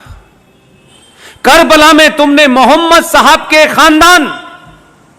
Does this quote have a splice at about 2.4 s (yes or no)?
no